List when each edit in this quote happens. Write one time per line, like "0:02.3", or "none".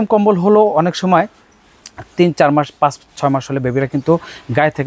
none